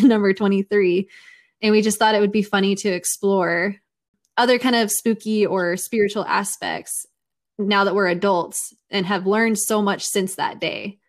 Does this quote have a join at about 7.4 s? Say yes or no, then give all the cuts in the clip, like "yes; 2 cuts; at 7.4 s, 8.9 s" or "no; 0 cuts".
no; 1 cut; at 4.2 s